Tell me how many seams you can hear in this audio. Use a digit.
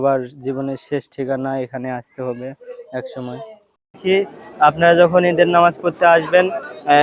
1